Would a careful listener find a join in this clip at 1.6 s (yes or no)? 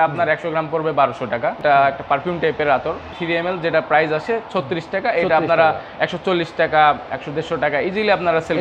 yes